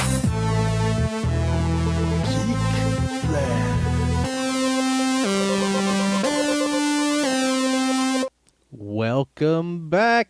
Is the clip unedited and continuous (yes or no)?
no